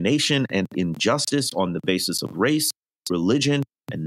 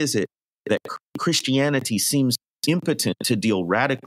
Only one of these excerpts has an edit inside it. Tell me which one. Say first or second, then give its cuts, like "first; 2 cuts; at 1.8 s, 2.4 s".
second; 2 cuts; at 0.9 s, 2.5 s